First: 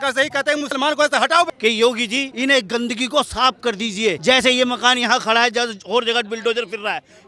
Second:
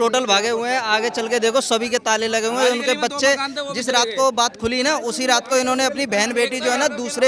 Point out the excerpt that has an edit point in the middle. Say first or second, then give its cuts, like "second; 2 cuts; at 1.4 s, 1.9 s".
first; 3 cuts; at 1.5 s, 2.3 s, 4.2 s